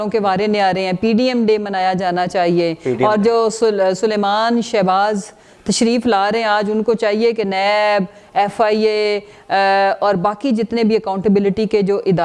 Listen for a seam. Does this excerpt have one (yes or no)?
no